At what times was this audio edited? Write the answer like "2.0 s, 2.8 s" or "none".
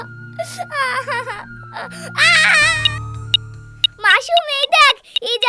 2.8 s